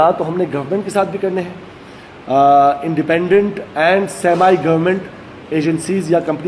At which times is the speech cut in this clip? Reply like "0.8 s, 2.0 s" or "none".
none